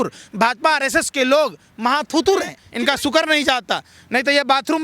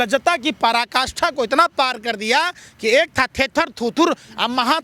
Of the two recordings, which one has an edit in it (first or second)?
first